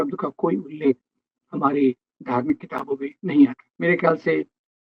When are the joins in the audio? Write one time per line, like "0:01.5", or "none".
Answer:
0:03.7